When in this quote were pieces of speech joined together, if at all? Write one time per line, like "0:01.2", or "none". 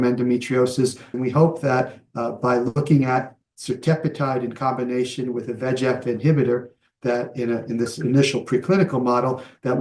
0:01.1